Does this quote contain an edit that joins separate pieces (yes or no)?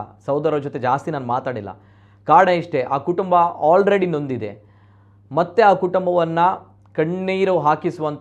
no